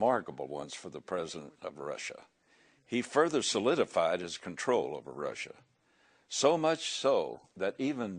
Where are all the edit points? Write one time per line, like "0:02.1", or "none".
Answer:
0:03.0